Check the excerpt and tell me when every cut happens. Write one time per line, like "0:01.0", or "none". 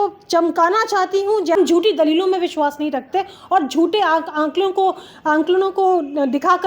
0:01.6